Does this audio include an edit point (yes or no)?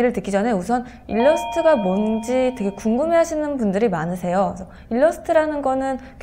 no